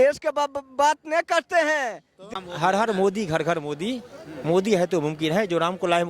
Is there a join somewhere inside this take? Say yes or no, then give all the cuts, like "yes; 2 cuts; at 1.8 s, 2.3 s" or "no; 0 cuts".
yes; 1 cut; at 2.3 s